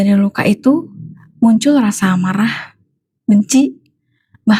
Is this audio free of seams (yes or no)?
yes